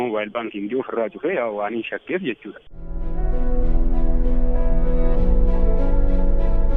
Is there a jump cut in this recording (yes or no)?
no